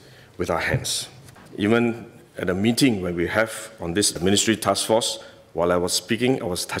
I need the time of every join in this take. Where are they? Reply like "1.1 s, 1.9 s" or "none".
1.4 s